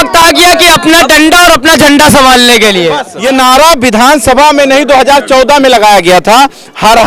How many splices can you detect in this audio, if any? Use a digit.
1